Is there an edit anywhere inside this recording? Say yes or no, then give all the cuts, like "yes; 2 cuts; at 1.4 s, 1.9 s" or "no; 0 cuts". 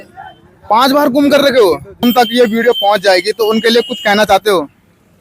yes; 1 cut; at 1.9 s